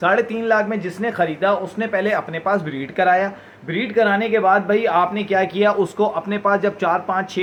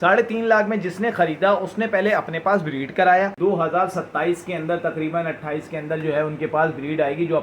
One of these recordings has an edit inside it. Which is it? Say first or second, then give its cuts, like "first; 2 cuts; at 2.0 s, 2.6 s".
second; 1 cut; at 3.3 s